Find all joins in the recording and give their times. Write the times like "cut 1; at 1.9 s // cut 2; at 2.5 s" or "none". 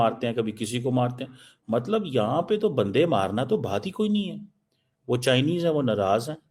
none